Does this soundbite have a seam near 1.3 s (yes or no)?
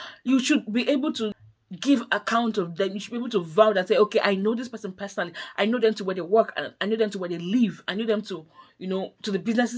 yes